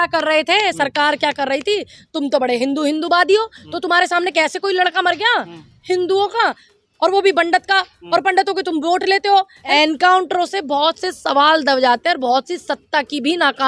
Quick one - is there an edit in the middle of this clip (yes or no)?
yes